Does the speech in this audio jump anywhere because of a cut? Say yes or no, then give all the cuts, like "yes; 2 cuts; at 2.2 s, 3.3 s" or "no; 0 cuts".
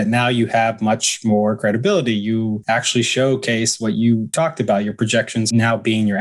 yes; 3 cuts; at 2.6 s, 4.3 s, 5.5 s